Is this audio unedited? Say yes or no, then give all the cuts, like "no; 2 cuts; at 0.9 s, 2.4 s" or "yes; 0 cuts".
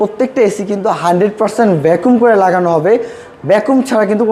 yes; 0 cuts